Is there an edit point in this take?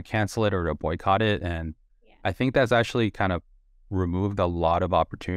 no; 0 cuts

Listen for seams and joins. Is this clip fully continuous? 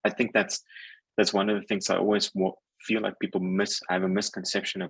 yes; 0 cuts

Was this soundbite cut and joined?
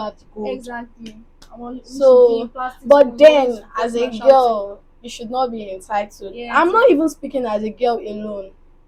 no; 0 cuts

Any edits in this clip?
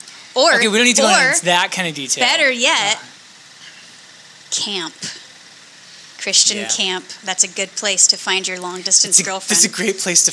no; 0 cuts

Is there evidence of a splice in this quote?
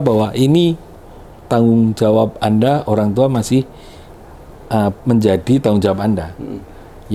no; 0 cuts

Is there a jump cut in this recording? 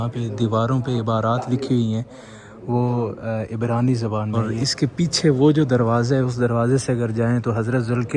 yes; 1 cut; at 4.3 s

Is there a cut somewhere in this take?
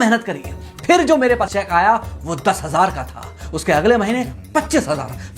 yes; 1 cut; at 1.4 s

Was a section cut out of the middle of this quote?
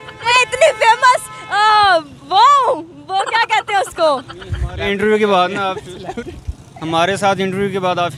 no; 0 cuts

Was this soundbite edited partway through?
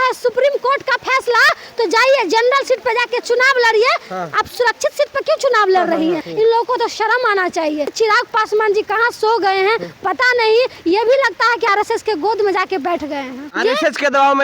yes; 3 cuts; at 6.3 s, 7.9 s, 13.4 s

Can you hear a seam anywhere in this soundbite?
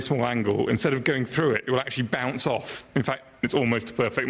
yes; 1 cut; at 3.4 s

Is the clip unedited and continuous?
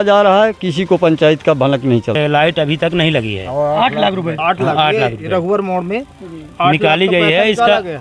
no; 1 cut; at 2.2 s

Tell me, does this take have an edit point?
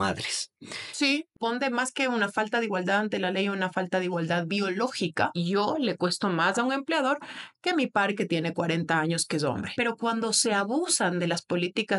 yes; 3 cuts; at 1.3 s, 5.3 s, 9.7 s

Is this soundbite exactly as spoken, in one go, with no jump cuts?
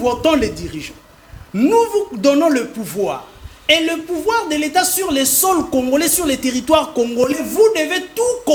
yes; 0 cuts

